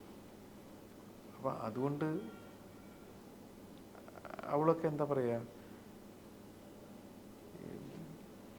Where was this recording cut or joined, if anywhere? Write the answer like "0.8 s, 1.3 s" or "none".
none